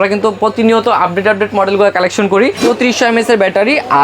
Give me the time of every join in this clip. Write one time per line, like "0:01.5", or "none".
0:02.6